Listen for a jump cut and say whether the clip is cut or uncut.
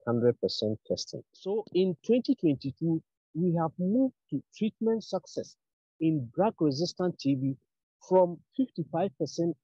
cut